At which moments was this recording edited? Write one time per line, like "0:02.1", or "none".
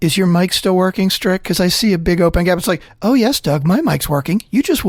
none